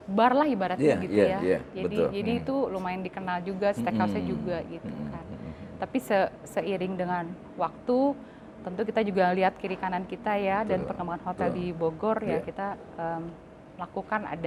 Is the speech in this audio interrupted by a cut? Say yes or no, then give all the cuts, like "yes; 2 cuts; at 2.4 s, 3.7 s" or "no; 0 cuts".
no; 0 cuts